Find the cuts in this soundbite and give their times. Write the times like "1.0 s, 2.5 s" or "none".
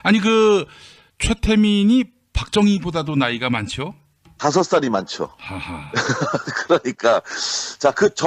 2.6 s